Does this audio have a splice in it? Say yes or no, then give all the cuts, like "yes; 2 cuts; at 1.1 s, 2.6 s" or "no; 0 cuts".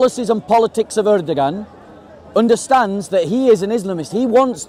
no; 0 cuts